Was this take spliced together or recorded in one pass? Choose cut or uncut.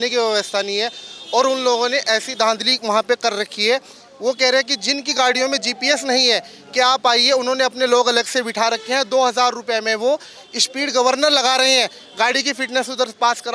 uncut